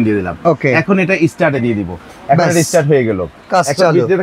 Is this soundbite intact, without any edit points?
yes; 0 cuts

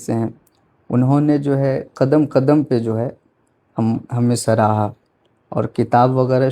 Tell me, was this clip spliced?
no; 0 cuts

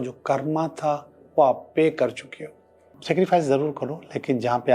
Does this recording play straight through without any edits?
no; 1 cut; at 2.9 s

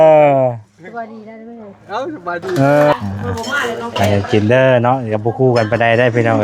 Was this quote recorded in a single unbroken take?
no; 1 cut; at 2.9 s

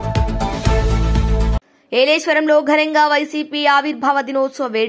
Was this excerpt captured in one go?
yes; 0 cuts

